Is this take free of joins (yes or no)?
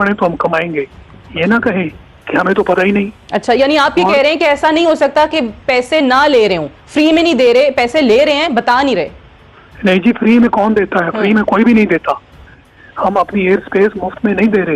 no